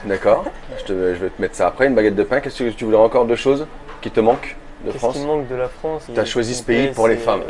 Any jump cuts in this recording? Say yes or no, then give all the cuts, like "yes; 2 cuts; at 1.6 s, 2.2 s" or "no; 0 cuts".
yes; 1 cut; at 6.0 s